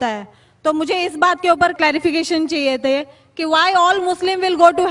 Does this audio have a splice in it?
no; 0 cuts

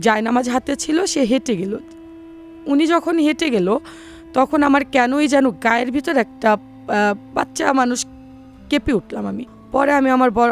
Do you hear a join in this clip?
yes; 1 cut; at 9.5 s

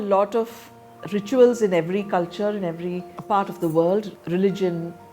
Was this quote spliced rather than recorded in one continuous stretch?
yes; 1 cut; at 3.1 s

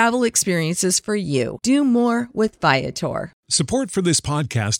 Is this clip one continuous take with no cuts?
no; 1 cut; at 3.4 s

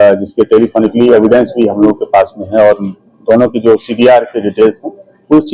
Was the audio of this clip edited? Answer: no; 0 cuts

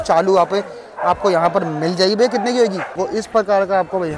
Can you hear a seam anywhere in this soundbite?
yes; 1 cut; at 3.0 s

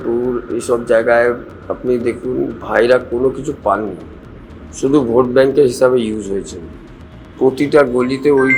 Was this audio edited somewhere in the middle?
no; 0 cuts

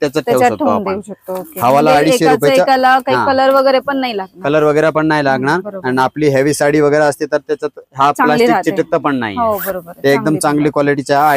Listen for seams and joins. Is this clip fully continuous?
yes; 0 cuts

